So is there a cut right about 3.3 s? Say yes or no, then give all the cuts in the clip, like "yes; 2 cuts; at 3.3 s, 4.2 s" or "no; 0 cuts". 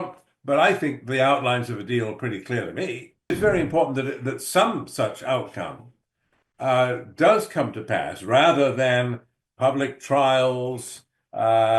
yes; 1 cut; at 3.3 s